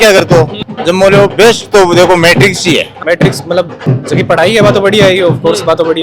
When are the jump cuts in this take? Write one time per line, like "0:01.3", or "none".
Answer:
0:02.9
0:03.8